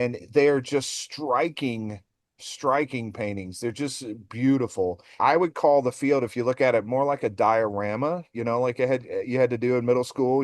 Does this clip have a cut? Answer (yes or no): yes